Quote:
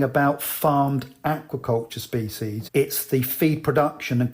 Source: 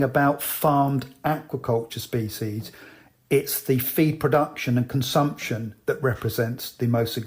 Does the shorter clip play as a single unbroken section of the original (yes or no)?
no